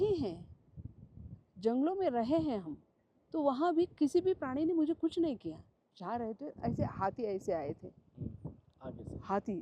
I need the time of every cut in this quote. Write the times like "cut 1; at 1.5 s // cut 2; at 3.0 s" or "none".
cut 1; at 5.9 s